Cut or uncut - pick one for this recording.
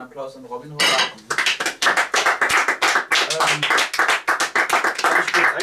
uncut